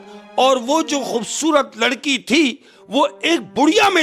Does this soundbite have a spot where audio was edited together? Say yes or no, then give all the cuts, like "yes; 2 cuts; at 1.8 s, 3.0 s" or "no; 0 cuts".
no; 0 cuts